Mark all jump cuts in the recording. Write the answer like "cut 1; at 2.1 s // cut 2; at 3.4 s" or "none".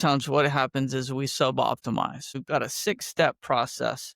cut 1; at 2.3 s